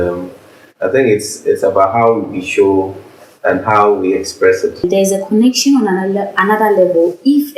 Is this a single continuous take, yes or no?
no